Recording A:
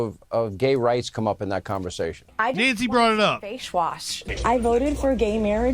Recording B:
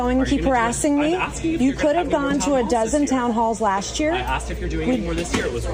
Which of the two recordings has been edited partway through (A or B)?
A